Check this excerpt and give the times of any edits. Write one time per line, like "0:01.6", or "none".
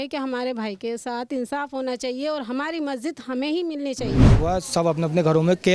0:04.4